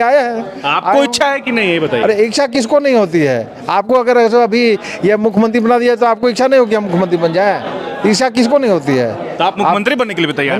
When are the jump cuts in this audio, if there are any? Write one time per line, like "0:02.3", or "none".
none